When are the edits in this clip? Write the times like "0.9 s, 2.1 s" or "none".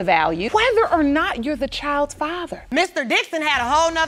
2.6 s